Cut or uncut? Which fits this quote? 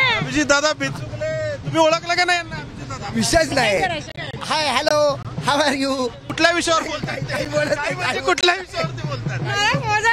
cut